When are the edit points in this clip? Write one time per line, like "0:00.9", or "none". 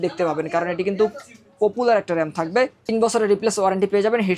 none